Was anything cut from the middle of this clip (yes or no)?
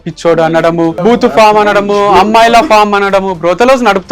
yes